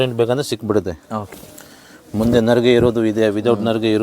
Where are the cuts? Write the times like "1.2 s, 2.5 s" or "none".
1.3 s

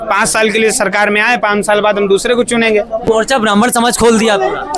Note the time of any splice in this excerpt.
3.1 s

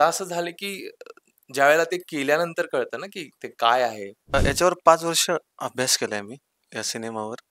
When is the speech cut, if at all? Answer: 4.3 s

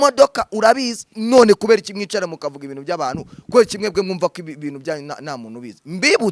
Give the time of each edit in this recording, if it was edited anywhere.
none

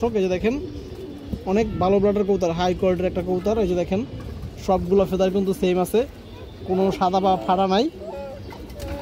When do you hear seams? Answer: none

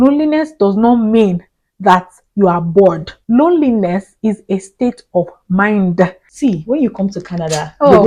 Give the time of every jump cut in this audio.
3.1 s, 6.2 s

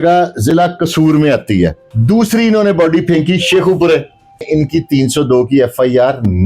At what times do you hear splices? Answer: 1.9 s, 4.5 s

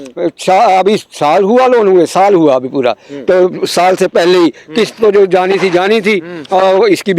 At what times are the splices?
none

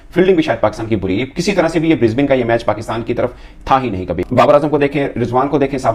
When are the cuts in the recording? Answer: none

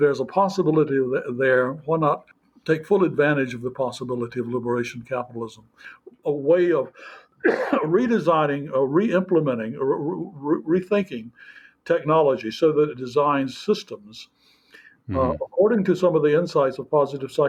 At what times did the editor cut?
none

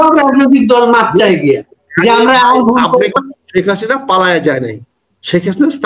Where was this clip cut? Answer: 3.1 s

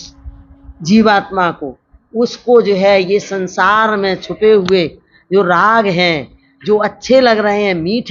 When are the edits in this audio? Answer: none

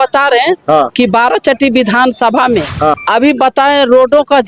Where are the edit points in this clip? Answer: 3.0 s

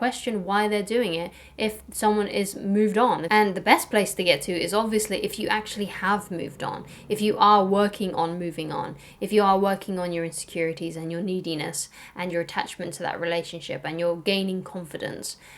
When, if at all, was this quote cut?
3.2 s

